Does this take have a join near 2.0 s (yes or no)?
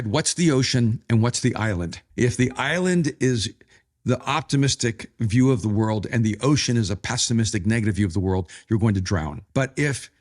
yes